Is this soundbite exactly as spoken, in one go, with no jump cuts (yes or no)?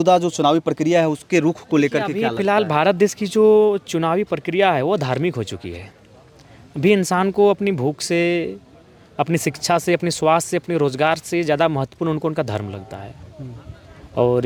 yes